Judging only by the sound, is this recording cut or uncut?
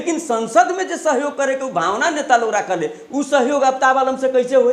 uncut